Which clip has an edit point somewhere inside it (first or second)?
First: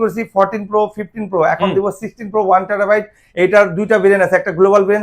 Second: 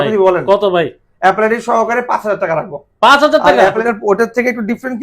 second